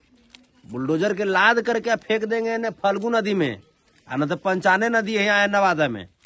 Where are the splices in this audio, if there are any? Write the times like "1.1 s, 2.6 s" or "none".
none